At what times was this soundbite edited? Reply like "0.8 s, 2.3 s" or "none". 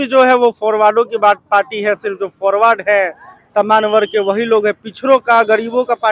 none